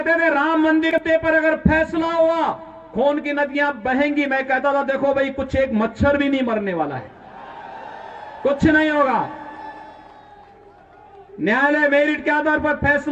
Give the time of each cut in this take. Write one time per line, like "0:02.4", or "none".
0:01.0

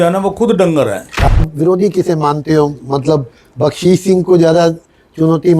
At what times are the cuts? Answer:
0:01.4

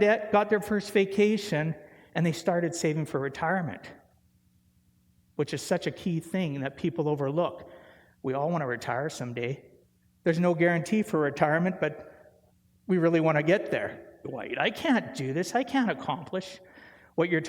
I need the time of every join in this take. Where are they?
0:14.2

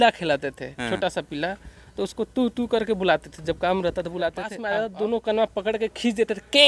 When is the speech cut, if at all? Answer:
0:04.6

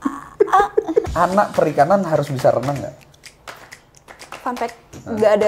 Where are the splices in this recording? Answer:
0:01.1

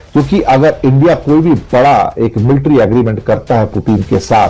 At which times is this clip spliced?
none

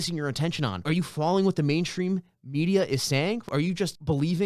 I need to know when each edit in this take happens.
0:00.8
0:03.4

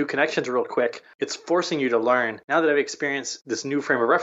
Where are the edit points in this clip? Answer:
0:01.0
0:02.4

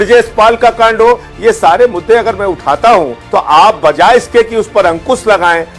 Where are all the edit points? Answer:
0:03.2

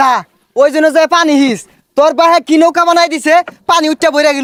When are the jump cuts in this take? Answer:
none

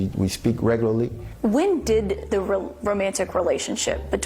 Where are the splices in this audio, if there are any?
0:01.2

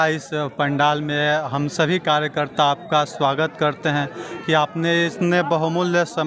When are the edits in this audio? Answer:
none

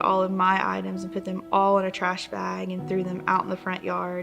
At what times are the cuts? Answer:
none

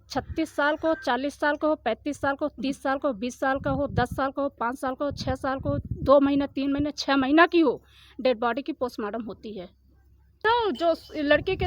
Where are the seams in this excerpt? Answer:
0:10.4

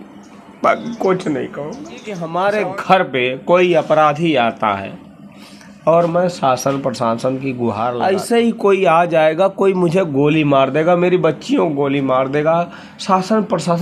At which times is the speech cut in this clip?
0:02.2
0:08.1

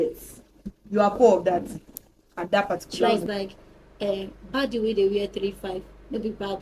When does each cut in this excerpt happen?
0:03.2

